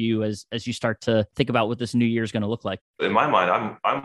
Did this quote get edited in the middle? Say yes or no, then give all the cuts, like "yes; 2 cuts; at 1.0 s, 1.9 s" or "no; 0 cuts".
yes; 2 cuts; at 1.3 s, 3.0 s